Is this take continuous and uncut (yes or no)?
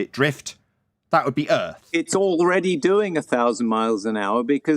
no